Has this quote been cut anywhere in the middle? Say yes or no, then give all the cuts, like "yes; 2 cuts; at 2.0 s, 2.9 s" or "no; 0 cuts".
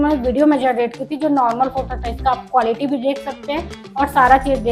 no; 0 cuts